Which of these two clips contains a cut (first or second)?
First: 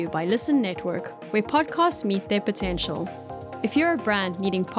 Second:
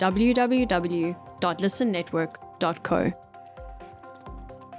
second